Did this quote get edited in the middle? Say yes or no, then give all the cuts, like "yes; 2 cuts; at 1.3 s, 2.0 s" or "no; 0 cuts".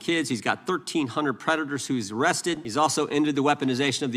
yes; 1 cut; at 2.6 s